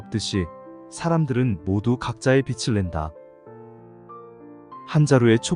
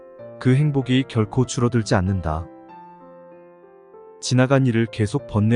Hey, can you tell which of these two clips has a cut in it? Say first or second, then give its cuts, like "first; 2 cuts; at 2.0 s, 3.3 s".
second; 2 cuts; at 2.4 s, 3.8 s